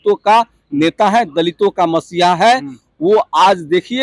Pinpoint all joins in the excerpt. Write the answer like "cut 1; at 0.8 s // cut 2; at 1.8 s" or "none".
none